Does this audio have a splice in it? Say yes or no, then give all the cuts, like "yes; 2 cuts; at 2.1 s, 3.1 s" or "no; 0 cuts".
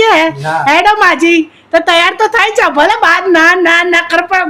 no; 0 cuts